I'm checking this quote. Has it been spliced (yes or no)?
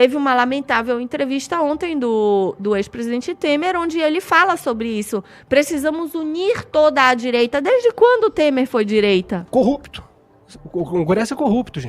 yes